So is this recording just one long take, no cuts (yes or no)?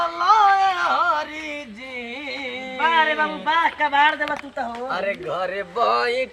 yes